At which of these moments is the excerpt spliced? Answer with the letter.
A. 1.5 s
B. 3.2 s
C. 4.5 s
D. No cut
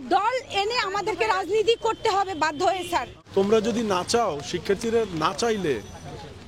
B